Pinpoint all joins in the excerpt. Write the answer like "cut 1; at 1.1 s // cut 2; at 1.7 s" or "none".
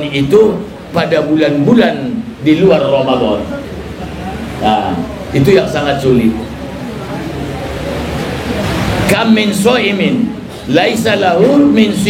cut 1; at 8.6 s